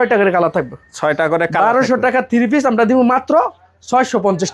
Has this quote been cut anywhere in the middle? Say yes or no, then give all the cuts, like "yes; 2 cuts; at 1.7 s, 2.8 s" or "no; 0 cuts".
no; 0 cuts